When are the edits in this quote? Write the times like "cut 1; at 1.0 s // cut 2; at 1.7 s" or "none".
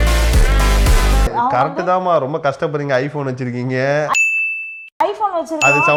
none